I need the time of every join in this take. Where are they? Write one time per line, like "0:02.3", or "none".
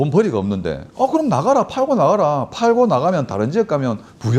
none